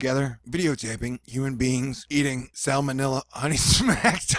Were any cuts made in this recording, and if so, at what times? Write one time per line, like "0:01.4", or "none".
none